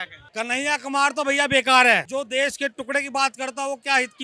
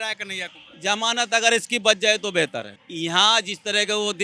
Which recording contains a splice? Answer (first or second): first